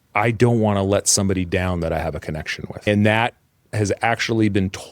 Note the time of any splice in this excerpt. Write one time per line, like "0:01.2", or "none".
0:02.9